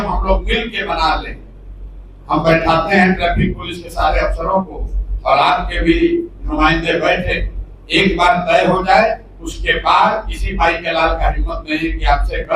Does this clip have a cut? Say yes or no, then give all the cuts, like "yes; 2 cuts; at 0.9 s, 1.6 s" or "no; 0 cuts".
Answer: no; 0 cuts